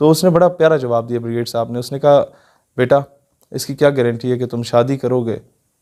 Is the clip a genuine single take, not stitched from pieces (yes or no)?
yes